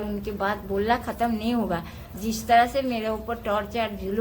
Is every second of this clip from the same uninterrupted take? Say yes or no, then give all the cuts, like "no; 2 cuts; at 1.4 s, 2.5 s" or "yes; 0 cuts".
yes; 0 cuts